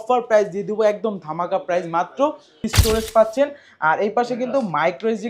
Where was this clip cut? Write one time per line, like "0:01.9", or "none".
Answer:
0:02.7